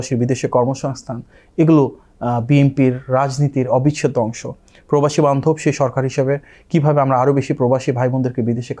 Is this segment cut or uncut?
uncut